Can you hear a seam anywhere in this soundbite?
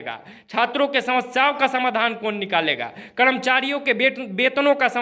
no; 0 cuts

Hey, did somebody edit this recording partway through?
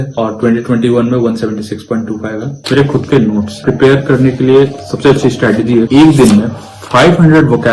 yes; 3 cuts; at 2.5 s, 3.6 s, 5.9 s

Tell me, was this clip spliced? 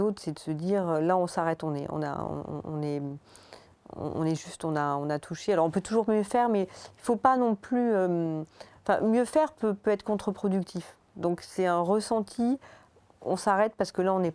no; 0 cuts

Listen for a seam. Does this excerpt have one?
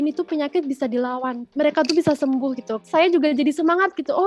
yes; 2 cuts; at 1.4 s, 2.8 s

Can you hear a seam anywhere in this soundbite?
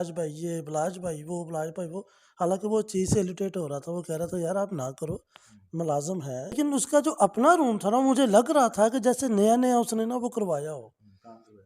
yes; 1 cut; at 6.5 s

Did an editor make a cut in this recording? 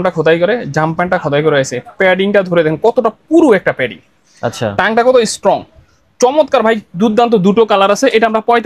no; 0 cuts

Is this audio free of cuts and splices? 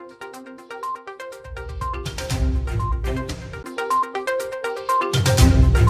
no; 1 cut; at 1.4 s

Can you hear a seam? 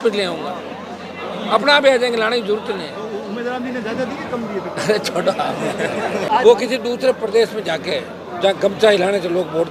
yes; 1 cut; at 6.3 s

